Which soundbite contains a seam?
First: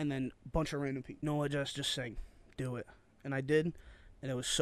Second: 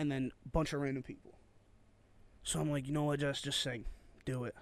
first; 1 cut; at 1.2 s

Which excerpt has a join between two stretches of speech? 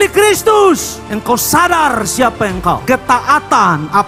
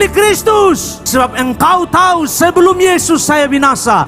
second; 1 cut; at 1.1 s

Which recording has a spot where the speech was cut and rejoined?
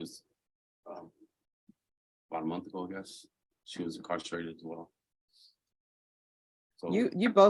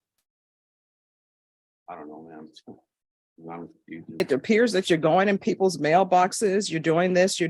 second; 1 cut; at 4.2 s

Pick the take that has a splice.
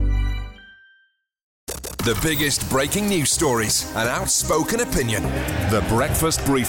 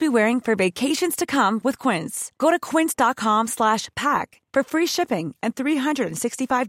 first; 1 cut; at 1.5 s

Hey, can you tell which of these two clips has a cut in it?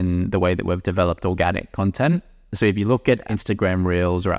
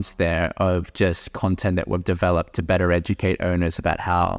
first; 1 cut; at 3.2 s

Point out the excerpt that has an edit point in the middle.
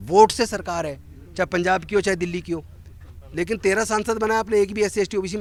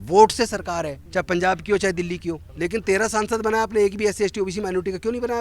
second; 2 cuts; at 1.0 s, 2.5 s

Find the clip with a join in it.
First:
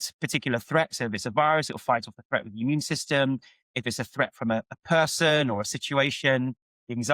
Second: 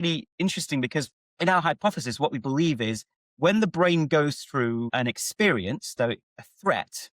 second; 2 cuts; at 1.2 s, 4.9 s

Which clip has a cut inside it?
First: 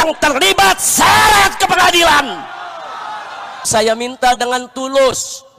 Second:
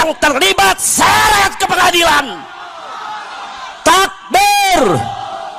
first; 1 cut; at 3.7 s

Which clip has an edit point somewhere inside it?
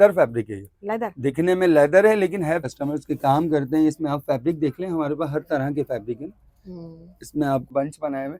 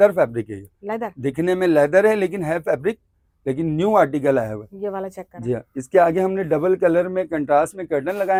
first; 2 cuts; at 2.6 s, 7.7 s

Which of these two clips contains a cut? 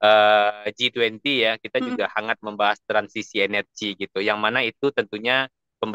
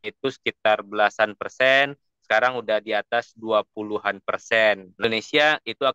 second; 1 cut; at 5.0 s

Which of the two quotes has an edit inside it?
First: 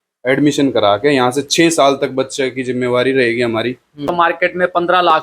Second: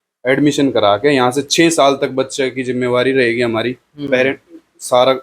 first; 1 cut; at 4.1 s

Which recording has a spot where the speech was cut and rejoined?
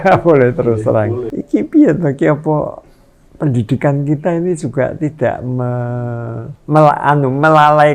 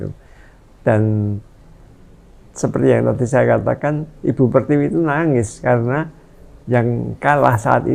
first; 2 cuts; at 1.3 s, 6.5 s

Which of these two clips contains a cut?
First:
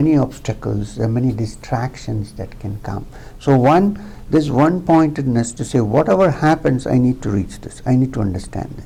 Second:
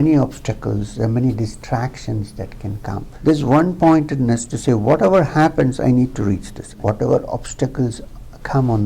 second; 2 cuts; at 3.0 s, 6.7 s

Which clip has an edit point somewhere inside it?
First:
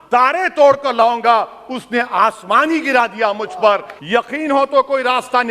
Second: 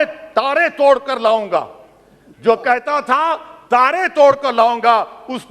first; 1 cut; at 3.9 s

